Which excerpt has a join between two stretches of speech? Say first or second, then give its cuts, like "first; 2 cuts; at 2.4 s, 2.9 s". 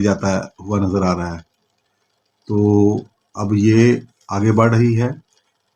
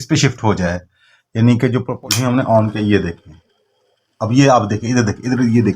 second; 1 cut; at 1.9 s